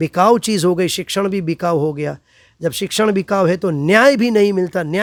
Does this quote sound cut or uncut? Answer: uncut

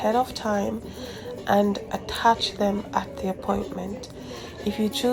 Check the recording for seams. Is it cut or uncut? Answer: uncut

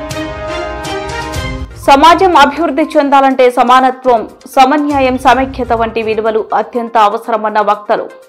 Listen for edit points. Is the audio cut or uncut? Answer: uncut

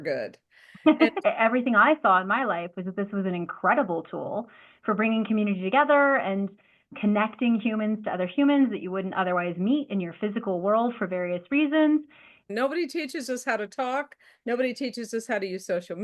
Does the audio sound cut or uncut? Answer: cut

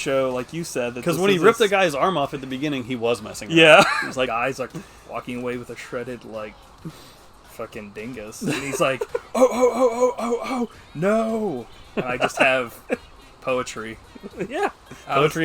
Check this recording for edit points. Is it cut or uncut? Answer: cut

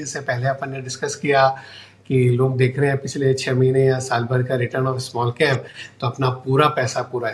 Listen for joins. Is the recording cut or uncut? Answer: uncut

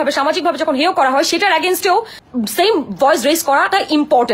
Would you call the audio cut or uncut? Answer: cut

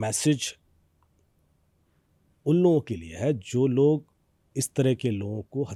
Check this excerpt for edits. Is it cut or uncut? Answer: uncut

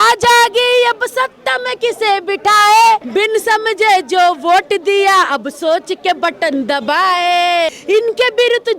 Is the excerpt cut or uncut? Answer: cut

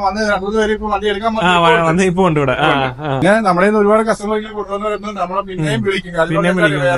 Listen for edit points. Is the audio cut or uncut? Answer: cut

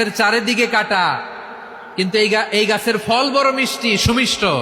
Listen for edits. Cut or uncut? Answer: uncut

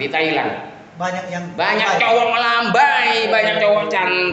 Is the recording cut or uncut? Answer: uncut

